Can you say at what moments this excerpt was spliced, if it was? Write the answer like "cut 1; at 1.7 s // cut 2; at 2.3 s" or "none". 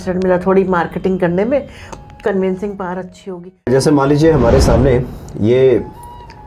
cut 1; at 3.7 s